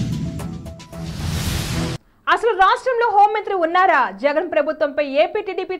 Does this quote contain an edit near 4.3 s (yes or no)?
no